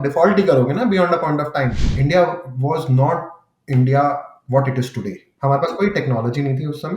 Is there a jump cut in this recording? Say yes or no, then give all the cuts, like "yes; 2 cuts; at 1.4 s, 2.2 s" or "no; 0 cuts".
yes; 2 cuts; at 1.9 s, 5.2 s